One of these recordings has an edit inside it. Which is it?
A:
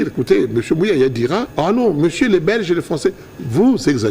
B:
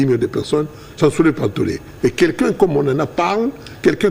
A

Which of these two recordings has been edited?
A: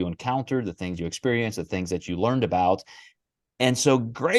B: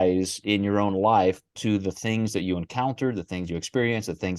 B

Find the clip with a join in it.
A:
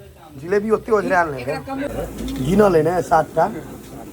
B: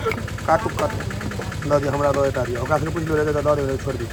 A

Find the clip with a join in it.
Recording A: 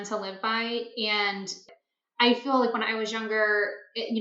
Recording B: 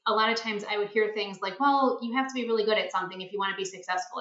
A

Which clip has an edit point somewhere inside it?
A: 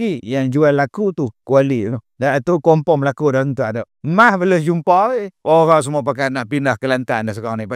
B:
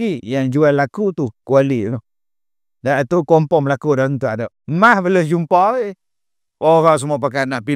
A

